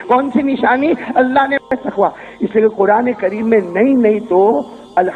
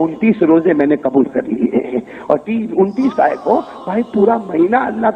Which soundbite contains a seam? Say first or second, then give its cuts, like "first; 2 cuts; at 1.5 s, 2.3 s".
first; 1 cut; at 1.6 s